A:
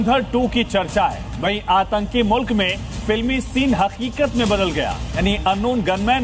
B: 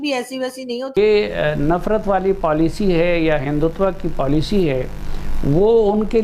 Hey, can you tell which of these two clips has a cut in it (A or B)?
B